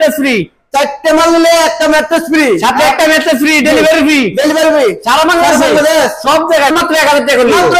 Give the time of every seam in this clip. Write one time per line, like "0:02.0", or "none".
0:06.7